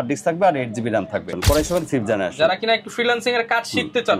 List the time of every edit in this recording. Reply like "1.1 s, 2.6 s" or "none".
1.3 s